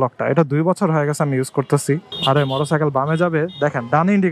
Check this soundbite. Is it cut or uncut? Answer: cut